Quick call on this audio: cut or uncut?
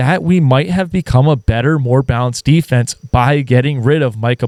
uncut